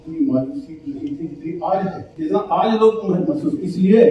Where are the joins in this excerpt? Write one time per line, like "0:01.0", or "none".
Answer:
0:02.1